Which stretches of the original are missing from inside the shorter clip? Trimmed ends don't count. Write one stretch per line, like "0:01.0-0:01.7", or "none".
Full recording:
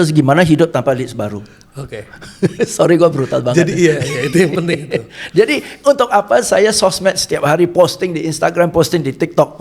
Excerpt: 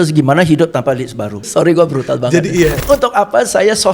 0:01.5-0:02.7
0:04.0-0:05.8